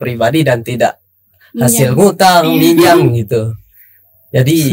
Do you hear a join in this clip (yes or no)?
no